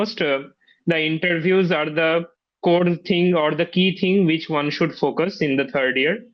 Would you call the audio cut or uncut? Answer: uncut